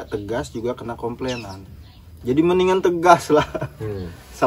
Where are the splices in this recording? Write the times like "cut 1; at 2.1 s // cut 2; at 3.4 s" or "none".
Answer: none